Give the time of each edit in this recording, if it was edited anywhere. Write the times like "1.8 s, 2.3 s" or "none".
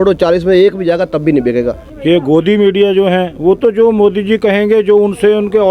1.9 s